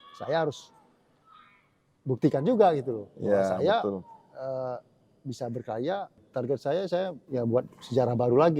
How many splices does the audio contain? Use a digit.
2